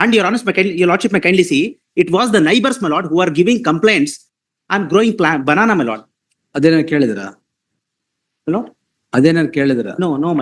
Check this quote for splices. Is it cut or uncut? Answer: cut